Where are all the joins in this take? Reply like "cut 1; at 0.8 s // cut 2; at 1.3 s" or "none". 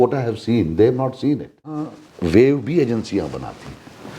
cut 1; at 1.8 s